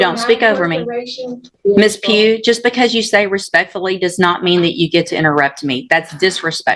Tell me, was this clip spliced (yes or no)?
yes